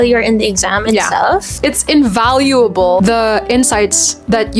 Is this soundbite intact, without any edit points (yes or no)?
no